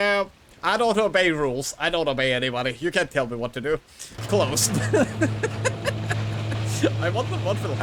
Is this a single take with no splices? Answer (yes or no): yes